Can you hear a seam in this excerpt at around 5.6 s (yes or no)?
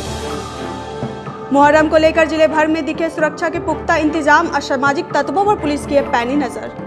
no